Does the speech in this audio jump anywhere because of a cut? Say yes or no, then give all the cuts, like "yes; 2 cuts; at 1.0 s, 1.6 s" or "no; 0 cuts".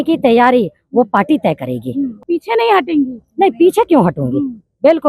yes; 1 cut; at 2.1 s